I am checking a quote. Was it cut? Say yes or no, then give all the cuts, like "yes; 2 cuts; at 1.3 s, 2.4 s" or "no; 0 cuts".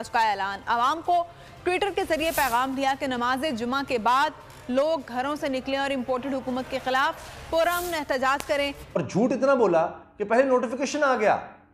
yes; 1 cut; at 8.8 s